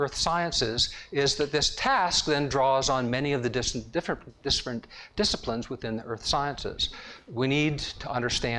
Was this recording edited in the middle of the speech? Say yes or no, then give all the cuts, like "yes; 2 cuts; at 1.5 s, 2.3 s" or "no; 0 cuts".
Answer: no; 0 cuts